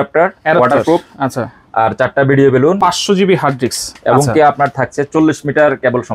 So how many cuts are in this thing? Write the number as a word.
one